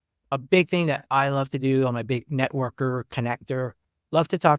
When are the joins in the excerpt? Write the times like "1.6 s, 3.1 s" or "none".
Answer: none